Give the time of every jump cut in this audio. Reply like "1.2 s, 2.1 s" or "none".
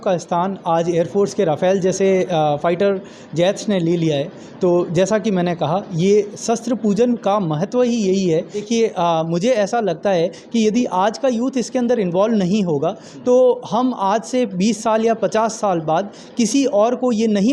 8.6 s